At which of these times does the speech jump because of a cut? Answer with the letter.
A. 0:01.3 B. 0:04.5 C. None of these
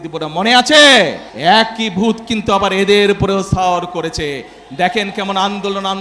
A